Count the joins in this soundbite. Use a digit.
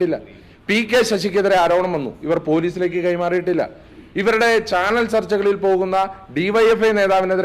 0